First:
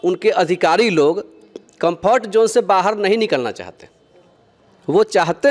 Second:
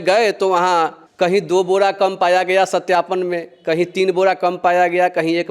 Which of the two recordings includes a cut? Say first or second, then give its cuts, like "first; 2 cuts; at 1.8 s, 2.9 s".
second; 1 cut; at 1.0 s